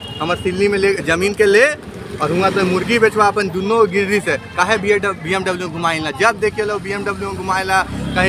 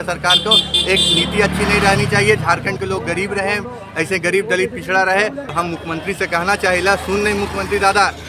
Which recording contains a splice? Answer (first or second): second